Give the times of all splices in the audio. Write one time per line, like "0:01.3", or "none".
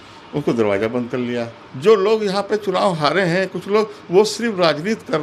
0:01.6